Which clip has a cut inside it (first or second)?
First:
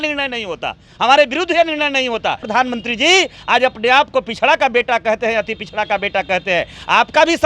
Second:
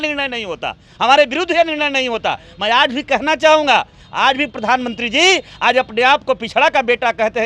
first